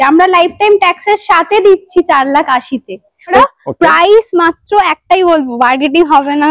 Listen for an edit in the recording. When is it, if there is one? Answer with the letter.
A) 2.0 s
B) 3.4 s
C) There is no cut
B